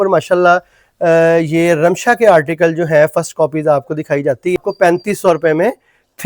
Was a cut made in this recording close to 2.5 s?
no; 1 cut; at 4.6 s

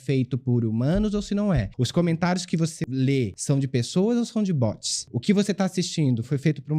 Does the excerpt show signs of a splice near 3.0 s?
yes; 3 cuts; at 1.7 s, 3.0 s, 5.1 s

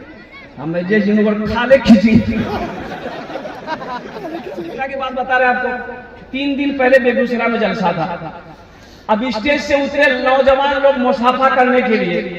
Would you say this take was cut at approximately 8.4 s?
no; 1 cut; at 4.8 s

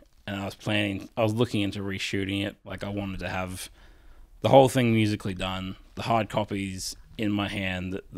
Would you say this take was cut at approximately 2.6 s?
yes; 1 cut; at 2.6 s

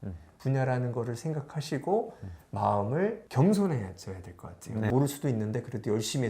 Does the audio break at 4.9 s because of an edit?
yes; 2 cuts; at 3.2 s, 4.9 s

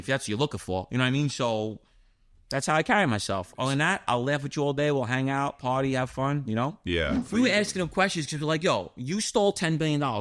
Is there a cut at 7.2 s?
yes; 1 cut; at 7.2 s

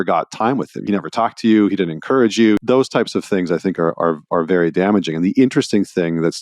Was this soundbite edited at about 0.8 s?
yes; 2 cuts; at 0.8 s, 2.6 s

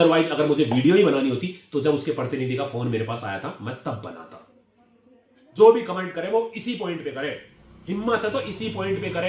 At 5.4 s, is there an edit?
yes; 1 cut; at 5.4 s

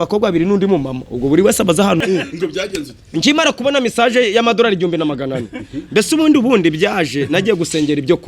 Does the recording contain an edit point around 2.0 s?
yes; 1 cut; at 2.0 s

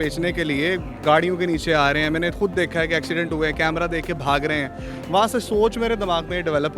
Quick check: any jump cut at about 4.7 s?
no; 0 cuts

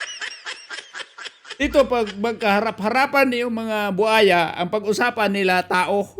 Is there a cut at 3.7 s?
no; 1 cut; at 1.6 s

